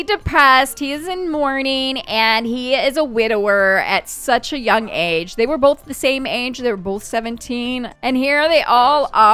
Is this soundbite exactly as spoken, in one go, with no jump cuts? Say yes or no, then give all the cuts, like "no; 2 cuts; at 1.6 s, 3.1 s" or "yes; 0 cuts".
yes; 0 cuts